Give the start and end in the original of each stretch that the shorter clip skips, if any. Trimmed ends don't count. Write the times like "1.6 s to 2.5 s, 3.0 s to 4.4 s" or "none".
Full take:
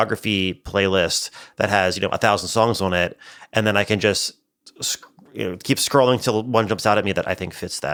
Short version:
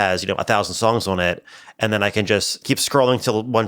4.3 s to 5.6 s